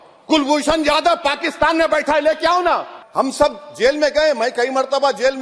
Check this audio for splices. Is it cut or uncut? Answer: cut